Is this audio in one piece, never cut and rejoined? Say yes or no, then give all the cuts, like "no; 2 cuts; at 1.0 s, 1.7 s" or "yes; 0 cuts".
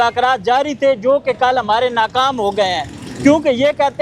yes; 0 cuts